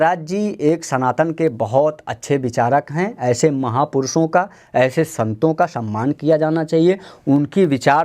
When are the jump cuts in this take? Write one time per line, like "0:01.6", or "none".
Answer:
none